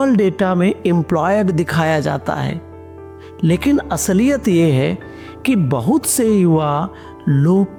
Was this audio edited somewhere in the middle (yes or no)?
no